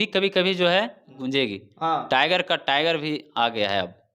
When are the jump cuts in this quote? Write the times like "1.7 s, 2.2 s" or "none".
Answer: 1.2 s